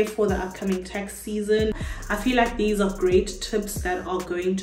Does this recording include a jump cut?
yes; 1 cut; at 1.7 s

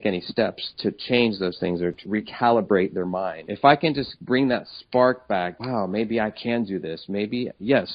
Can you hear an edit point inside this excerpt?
yes; 4 cuts; at 2.0 s, 3.4 s, 4.1 s, 5.6 s

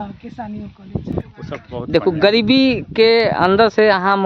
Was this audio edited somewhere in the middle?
yes; 1 cut; at 1.2 s

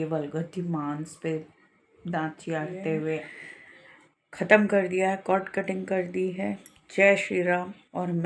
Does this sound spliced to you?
yes; 1 cut; at 3.4 s

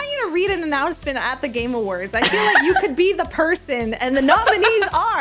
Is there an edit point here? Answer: no; 0 cuts

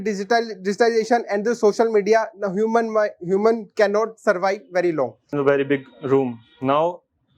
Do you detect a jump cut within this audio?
yes; 1 cut; at 5.3 s

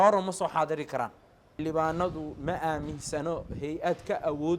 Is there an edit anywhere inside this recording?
yes; 1 cut; at 1.6 s

